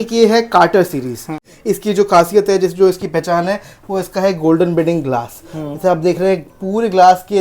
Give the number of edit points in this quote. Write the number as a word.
one